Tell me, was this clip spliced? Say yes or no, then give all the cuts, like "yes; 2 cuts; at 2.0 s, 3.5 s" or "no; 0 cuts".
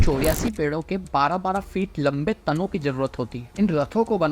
yes; 1 cut; at 3.4 s